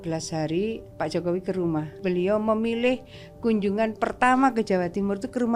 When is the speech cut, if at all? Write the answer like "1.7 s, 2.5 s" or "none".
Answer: 0.9 s, 2.0 s